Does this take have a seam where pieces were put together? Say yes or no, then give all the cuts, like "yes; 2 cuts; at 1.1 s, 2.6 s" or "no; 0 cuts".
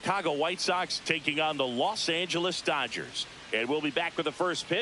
yes; 1 cut; at 3.2 s